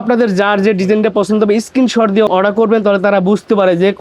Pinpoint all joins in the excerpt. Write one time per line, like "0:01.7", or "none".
0:02.3